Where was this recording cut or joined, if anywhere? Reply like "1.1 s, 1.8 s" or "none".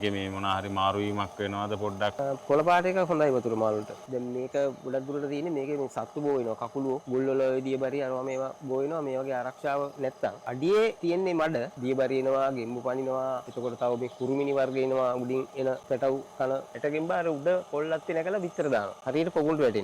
2.2 s, 4.0 s, 7.0 s, 10.4 s, 11.5 s, 13.5 s, 15.8 s, 16.7 s, 19.0 s